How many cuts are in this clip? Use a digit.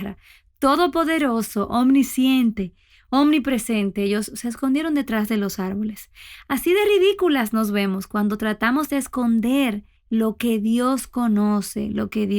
1